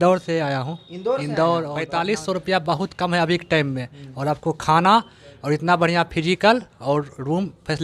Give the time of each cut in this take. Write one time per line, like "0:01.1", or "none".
0:01.8